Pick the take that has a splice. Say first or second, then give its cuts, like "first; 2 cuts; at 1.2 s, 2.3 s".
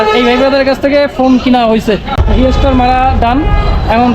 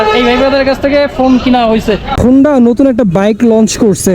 second; 1 cut; at 2.1 s